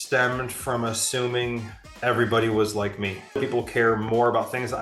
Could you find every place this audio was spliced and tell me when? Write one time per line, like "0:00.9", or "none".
0:03.4